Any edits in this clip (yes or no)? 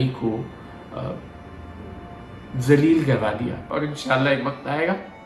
yes